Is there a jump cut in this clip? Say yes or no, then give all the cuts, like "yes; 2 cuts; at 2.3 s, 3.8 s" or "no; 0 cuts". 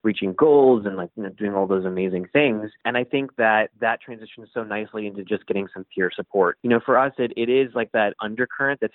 yes; 3 cuts; at 2.8 s, 6.6 s, 8.2 s